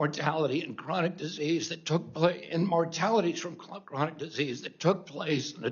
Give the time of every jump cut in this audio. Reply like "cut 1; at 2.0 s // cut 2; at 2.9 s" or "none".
none